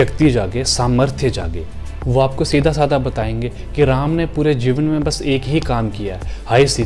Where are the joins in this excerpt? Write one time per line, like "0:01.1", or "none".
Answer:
none

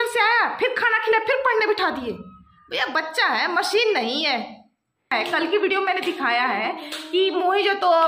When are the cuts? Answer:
0:05.1

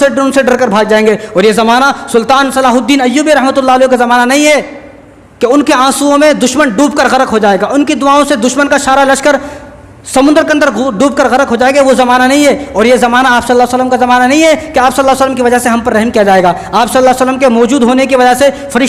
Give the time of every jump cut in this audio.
none

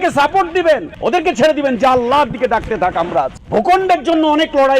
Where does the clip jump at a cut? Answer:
0:00.9
0:03.4

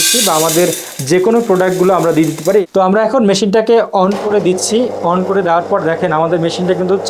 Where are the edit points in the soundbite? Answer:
0:02.6

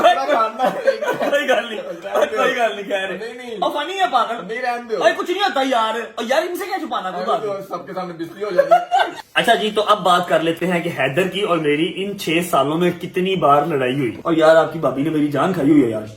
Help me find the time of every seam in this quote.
0:09.2
0:14.2

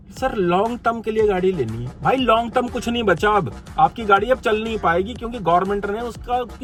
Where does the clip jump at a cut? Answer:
none

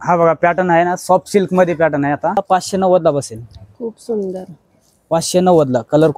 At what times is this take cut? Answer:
0:02.4

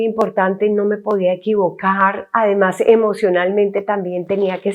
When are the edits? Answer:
none

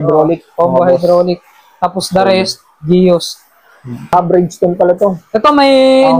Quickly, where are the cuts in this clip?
0:04.1

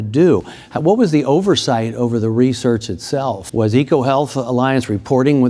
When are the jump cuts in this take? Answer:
0:03.4

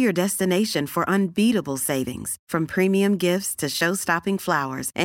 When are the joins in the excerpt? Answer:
none

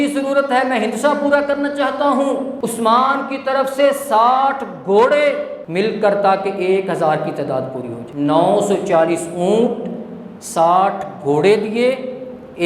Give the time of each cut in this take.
0:02.5
0:05.6
0:08.0

